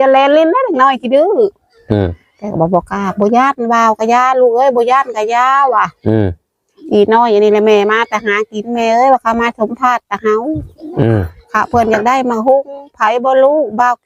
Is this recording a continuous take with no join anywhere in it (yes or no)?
yes